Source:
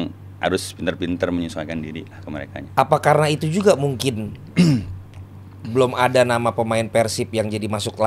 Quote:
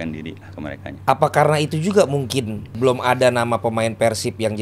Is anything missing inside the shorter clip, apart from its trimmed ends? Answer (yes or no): yes